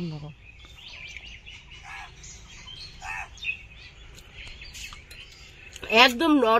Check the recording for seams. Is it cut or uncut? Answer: cut